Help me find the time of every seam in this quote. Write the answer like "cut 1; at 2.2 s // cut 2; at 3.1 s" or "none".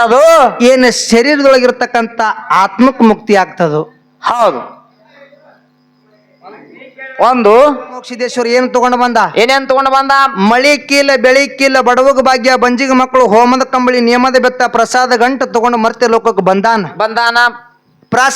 cut 1; at 8.2 s